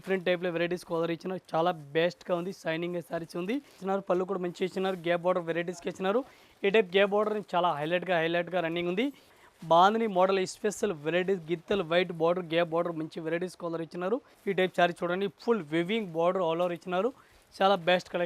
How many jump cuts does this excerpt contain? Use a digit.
3